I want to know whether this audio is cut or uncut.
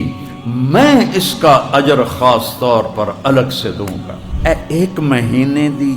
cut